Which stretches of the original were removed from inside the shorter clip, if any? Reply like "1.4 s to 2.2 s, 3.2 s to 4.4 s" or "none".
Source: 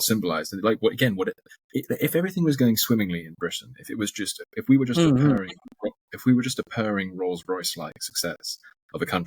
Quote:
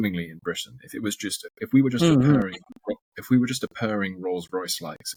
none